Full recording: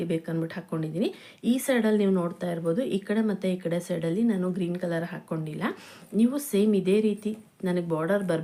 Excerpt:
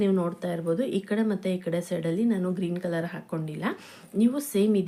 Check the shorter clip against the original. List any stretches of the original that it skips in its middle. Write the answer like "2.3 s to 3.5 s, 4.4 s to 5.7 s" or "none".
none